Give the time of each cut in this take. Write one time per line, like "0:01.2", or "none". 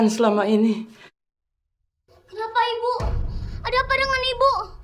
0:01.9